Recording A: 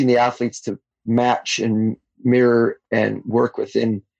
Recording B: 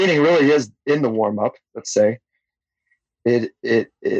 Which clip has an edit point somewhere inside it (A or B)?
A